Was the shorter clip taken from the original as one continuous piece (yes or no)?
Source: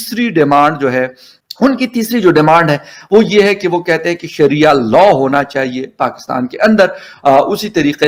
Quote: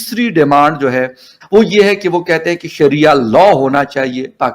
no